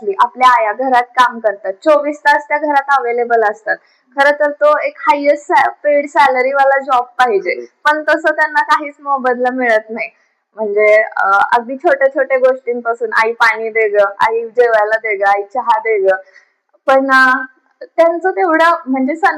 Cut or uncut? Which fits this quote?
uncut